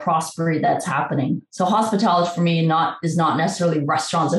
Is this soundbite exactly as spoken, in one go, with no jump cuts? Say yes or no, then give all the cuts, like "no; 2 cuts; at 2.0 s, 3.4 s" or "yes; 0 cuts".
yes; 0 cuts